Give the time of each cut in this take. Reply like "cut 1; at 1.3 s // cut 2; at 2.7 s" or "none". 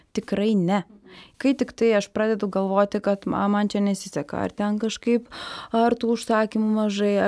cut 1; at 1.3 s